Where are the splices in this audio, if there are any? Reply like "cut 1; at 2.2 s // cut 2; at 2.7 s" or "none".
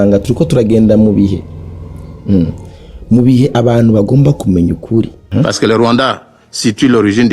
cut 1; at 5.2 s